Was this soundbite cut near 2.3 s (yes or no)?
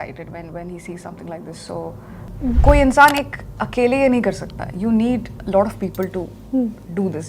yes